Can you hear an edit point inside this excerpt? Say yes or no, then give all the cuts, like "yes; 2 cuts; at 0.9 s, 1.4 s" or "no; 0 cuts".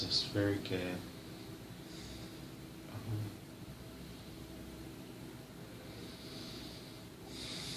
no; 0 cuts